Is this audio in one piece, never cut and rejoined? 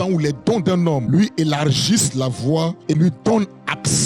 no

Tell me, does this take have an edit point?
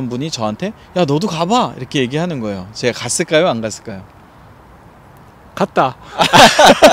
no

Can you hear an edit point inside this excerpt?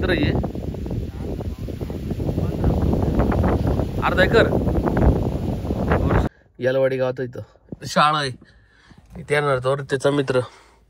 yes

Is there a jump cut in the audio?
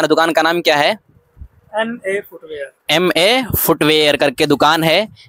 no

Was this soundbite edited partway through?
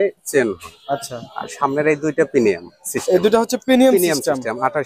no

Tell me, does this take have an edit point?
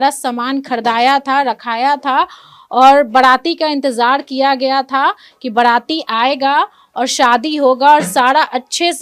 no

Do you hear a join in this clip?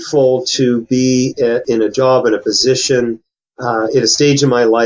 yes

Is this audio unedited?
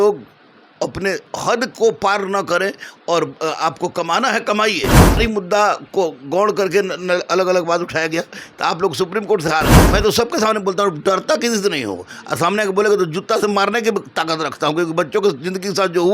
no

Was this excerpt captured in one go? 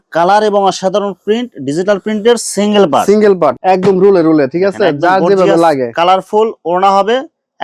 no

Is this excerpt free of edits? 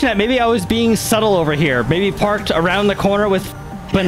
yes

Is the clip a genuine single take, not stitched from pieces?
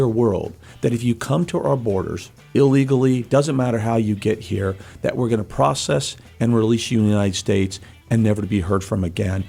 yes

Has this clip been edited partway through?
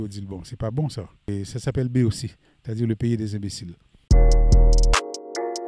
yes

